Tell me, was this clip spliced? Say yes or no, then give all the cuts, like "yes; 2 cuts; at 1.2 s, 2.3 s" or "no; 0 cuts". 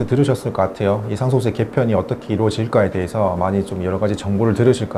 no; 0 cuts